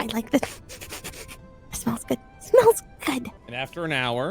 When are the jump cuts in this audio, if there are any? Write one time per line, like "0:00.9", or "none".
0:03.3